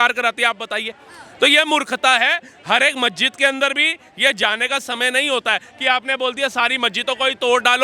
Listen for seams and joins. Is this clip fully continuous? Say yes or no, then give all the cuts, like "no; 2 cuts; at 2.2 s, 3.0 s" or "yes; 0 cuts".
yes; 0 cuts